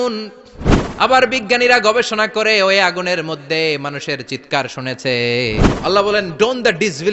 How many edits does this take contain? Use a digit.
1